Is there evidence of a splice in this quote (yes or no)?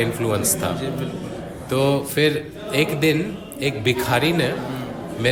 no